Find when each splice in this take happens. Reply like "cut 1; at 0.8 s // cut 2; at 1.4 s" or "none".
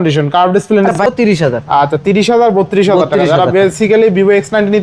cut 1; at 1.1 s

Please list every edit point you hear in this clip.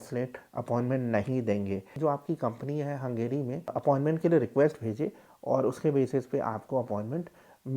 cut 1; at 1.9 s // cut 2; at 3.7 s

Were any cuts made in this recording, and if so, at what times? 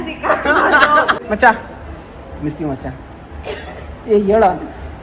cut 1; at 1.2 s

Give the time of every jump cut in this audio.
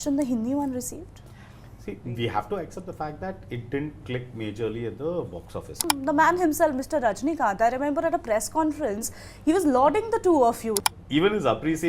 cut 1; at 5.8 s // cut 2; at 10.8 s

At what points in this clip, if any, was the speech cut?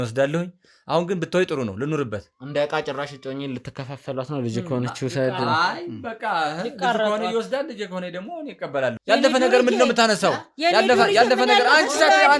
cut 1; at 9.0 s

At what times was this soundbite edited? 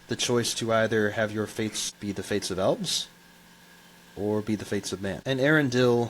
cut 1; at 1.9 s // cut 2; at 5.2 s

